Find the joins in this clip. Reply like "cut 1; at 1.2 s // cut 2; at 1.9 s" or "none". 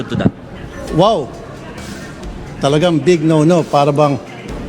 none